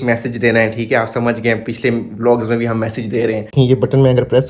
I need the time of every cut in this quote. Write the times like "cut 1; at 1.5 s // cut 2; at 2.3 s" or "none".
cut 1; at 3.5 s